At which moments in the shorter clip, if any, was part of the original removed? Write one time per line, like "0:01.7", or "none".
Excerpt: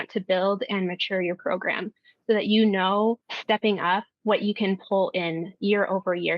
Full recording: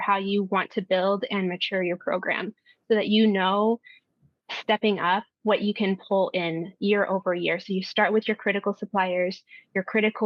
0:03.3